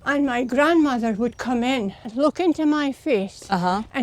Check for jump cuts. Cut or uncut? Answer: cut